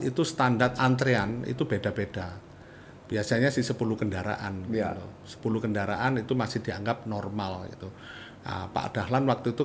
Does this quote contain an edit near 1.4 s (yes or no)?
no